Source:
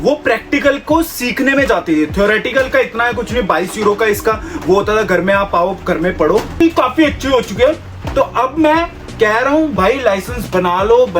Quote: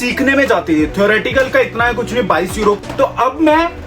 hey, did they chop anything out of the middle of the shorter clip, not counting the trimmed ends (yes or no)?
yes